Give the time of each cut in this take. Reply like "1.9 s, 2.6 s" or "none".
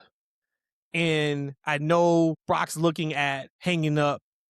2.4 s, 3.5 s

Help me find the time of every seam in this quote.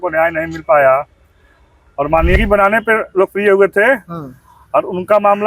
2.4 s

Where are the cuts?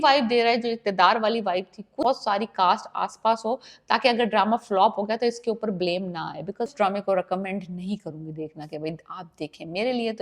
2.0 s, 6.7 s

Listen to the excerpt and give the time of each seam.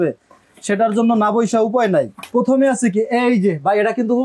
2.2 s

